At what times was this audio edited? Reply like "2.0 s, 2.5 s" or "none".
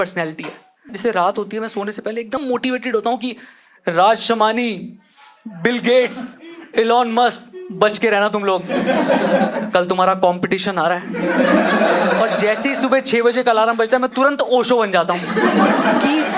0.9 s, 2.4 s